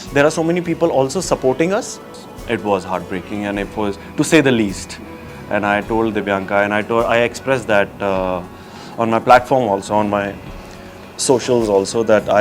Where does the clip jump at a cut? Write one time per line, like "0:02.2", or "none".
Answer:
0:02.1